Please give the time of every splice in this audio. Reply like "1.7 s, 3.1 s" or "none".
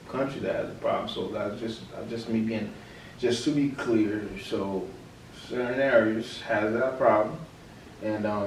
none